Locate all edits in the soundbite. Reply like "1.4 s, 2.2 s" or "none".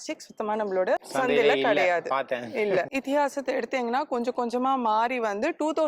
2.9 s